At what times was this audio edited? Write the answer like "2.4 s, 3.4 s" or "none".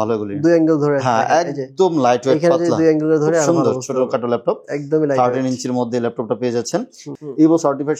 7.1 s